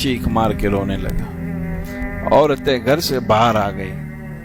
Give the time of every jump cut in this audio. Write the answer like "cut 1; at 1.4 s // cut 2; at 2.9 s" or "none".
none